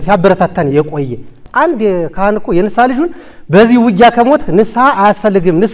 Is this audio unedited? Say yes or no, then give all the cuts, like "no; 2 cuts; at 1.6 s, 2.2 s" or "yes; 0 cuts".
no; 1 cut; at 1.4 s